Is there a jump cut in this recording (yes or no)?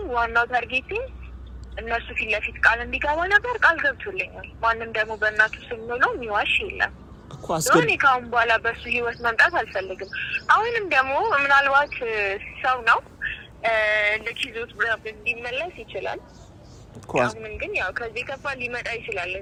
no